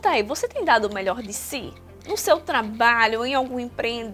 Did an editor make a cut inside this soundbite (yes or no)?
no